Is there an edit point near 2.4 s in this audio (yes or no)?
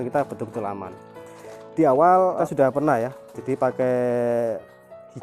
yes